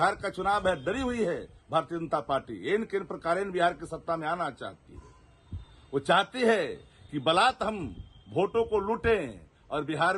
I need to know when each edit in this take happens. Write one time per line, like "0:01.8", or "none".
none